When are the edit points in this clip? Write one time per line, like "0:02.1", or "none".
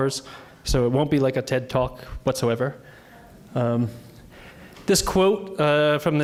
none